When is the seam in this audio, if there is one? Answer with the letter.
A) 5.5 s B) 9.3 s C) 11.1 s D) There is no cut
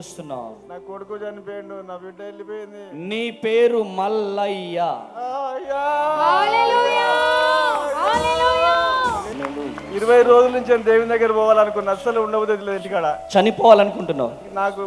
B